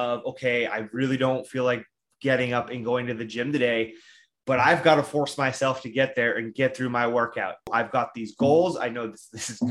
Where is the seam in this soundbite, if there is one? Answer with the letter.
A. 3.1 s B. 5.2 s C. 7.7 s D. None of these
C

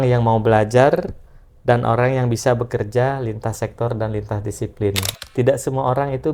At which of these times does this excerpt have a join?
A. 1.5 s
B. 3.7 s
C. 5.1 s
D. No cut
C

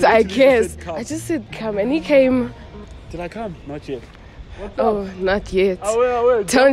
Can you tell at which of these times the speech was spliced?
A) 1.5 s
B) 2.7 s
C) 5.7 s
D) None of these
D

